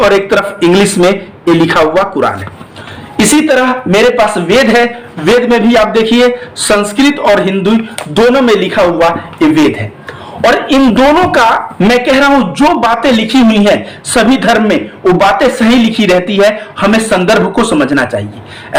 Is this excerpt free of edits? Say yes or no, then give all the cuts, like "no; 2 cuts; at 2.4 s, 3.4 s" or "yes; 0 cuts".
yes; 0 cuts